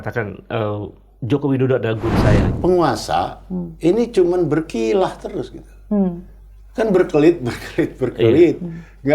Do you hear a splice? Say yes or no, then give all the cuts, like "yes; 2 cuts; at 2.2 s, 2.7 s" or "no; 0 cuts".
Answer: yes; 1 cut; at 2.5 s